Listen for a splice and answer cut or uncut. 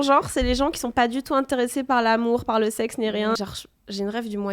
cut